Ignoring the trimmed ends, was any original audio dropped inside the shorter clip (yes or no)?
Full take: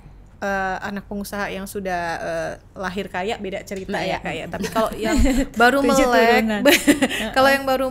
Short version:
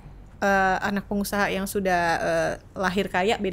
no